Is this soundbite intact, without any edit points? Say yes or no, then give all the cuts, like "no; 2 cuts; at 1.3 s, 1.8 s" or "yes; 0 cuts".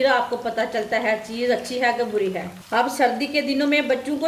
no; 1 cut; at 2.6 s